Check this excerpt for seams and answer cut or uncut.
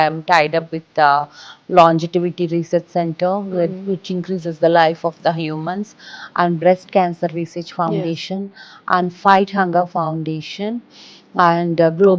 uncut